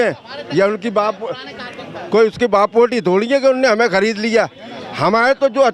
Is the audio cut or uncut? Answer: uncut